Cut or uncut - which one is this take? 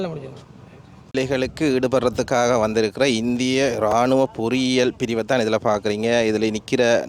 cut